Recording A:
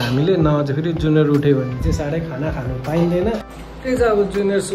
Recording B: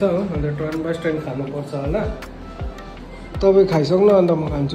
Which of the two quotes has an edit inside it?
A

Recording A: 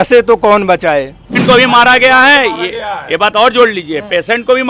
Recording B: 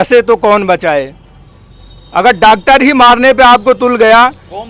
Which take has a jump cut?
A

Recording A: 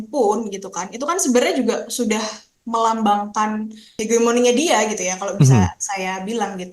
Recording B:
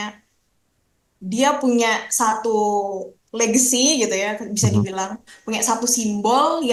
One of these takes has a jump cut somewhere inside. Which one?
A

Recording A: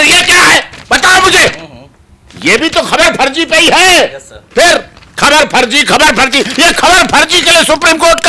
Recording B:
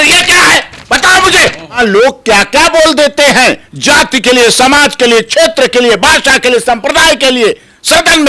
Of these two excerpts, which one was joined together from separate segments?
B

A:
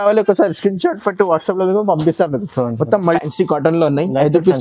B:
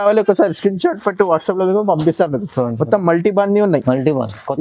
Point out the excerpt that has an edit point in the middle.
A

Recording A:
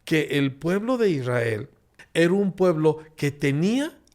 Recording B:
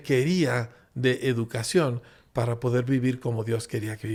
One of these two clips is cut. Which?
A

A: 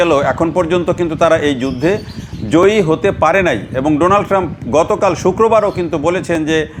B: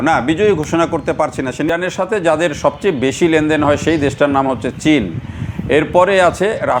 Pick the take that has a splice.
B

